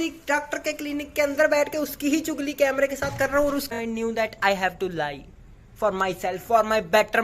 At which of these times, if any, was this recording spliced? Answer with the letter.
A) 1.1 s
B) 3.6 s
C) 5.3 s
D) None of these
B